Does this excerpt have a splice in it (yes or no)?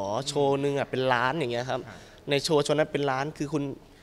no